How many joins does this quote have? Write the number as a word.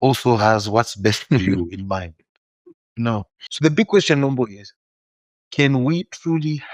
one